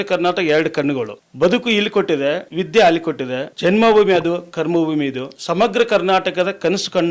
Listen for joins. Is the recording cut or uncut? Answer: cut